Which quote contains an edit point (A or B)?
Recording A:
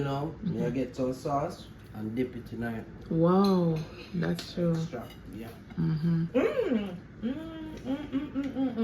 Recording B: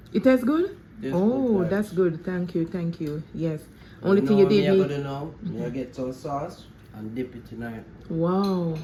A